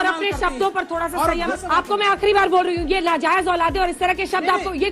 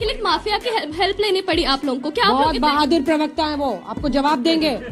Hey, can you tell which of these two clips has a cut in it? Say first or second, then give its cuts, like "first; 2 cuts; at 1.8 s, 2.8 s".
first; 1 cut; at 1.5 s